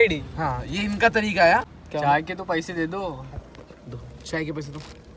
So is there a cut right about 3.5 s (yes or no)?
no